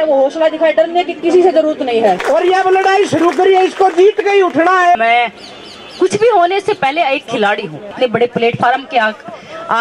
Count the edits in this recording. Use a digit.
3